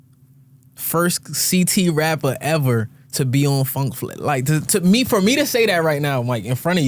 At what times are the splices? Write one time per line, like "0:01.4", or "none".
none